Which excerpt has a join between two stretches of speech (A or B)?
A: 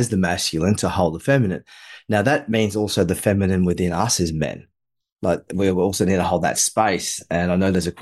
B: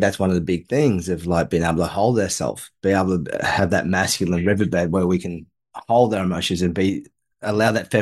B